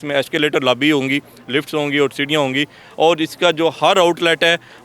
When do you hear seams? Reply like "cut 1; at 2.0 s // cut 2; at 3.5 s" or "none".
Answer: none